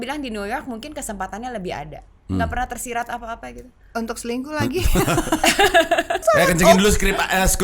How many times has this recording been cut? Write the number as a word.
one